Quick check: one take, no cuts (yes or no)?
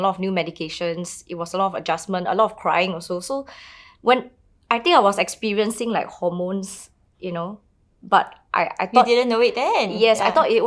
yes